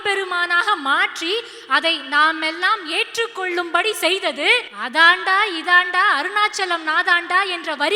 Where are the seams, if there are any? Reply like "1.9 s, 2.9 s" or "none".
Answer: 4.8 s